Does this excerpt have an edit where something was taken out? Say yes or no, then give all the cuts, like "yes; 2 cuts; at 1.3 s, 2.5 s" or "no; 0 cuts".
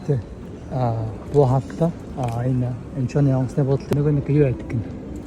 yes; 1 cut; at 3.9 s